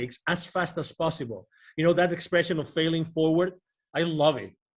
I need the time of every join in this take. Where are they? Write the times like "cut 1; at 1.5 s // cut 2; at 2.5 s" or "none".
none